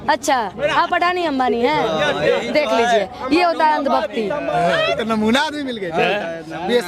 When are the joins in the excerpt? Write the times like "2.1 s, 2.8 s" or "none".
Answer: 4.5 s